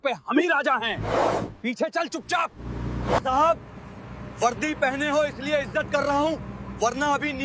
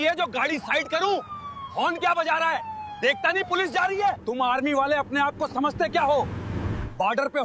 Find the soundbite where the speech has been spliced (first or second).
second